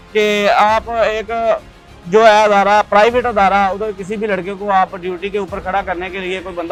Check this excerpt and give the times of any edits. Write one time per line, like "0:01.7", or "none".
none